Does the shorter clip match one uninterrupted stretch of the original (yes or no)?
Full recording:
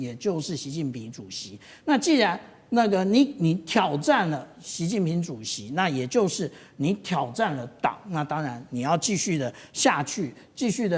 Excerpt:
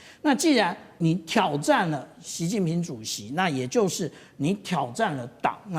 no